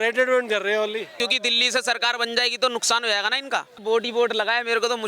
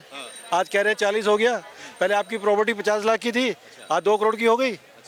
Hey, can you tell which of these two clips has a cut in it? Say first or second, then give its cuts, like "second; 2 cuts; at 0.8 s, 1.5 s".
first; 2 cuts; at 1.1 s, 3.8 s